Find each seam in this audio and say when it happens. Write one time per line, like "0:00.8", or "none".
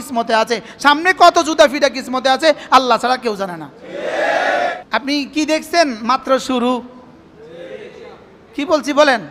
0:04.8